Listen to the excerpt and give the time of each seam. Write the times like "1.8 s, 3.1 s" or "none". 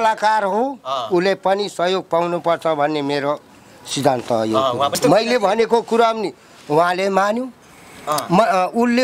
4.9 s